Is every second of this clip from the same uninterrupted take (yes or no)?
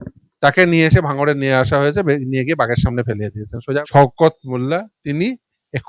no